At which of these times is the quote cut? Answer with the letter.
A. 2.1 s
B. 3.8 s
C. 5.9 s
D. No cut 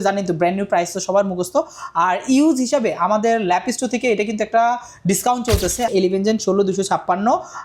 C